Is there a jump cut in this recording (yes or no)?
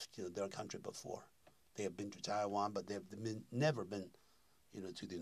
no